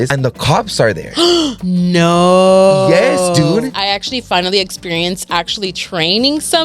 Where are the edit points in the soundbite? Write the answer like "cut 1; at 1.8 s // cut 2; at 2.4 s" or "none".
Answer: cut 1; at 3.8 s